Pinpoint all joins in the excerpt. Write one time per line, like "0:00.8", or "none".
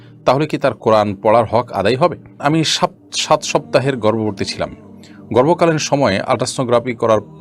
0:02.4